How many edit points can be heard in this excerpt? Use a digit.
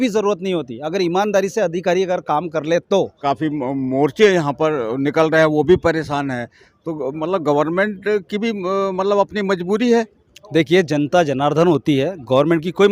1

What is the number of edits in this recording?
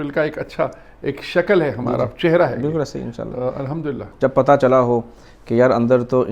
1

